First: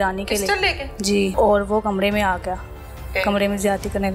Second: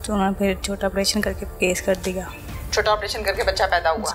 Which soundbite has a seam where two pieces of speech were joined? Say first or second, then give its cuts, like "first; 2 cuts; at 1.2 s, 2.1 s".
first; 1 cut; at 1.3 s